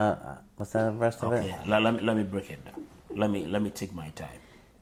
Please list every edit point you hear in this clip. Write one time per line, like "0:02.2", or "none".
none